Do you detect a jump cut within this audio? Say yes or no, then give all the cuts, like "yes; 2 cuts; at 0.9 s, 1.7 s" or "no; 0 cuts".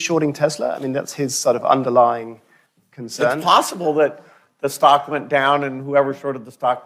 no; 0 cuts